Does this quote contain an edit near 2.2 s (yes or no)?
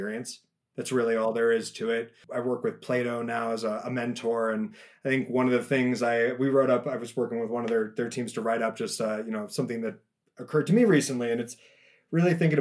yes